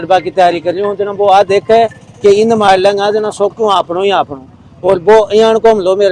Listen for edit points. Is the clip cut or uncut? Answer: uncut